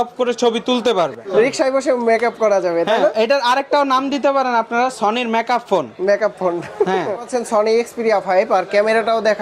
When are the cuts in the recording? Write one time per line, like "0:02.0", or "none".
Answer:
0:01.2
0:07.3

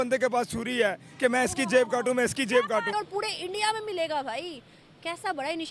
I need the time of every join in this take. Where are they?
0:02.9

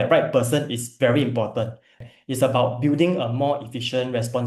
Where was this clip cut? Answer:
0:02.0

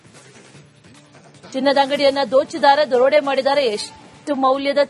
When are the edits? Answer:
0:01.5

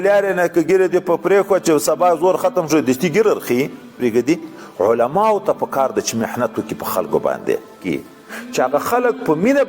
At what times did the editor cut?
0:04.0
0:07.8

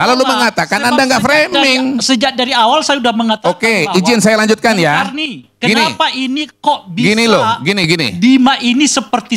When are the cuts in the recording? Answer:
none

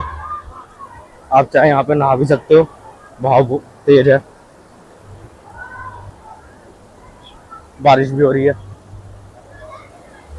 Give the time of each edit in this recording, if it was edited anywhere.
none

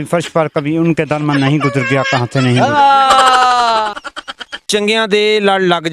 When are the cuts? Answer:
0:04.3

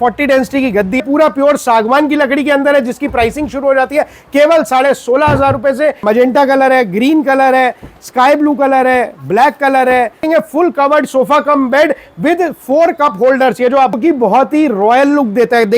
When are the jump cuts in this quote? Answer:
0:01.0
0:06.0
0:10.2
0:14.0

